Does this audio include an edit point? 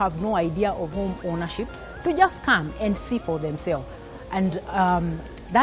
no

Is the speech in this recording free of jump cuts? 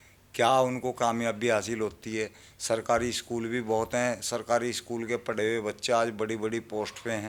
yes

